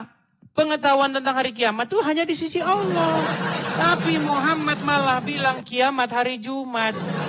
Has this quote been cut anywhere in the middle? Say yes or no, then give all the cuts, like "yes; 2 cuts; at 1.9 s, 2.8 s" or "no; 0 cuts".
no; 0 cuts